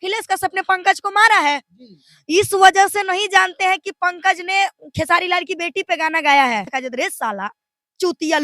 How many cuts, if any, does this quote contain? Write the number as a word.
one